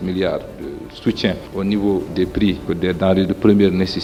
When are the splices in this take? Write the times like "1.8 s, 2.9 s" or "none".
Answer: none